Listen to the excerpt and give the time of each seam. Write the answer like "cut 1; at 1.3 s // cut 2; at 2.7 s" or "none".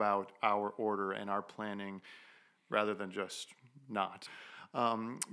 cut 1; at 4.4 s

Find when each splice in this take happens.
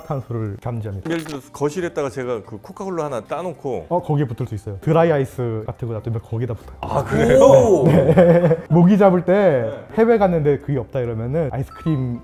cut 1; at 1.1 s // cut 2; at 8.6 s

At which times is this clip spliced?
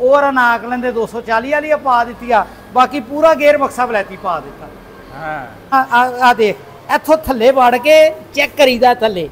cut 1; at 5.7 s

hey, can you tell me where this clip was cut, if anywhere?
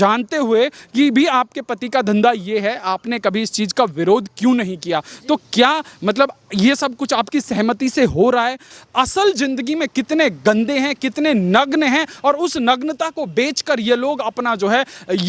cut 1; at 8.7 s

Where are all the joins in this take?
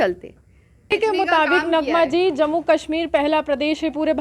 cut 1; at 0.9 s

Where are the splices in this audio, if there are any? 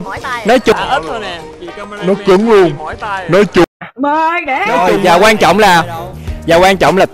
cut 1; at 4.9 s

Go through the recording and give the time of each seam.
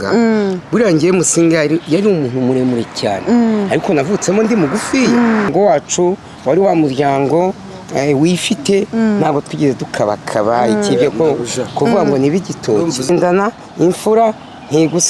cut 1; at 5.5 s // cut 2; at 13.1 s

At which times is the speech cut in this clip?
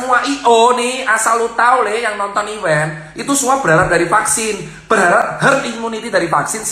none

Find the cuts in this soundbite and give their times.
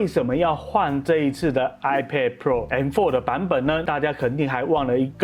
cut 1; at 3.8 s

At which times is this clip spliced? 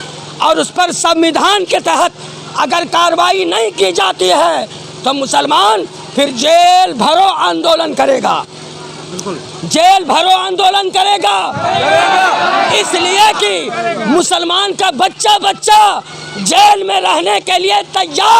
none

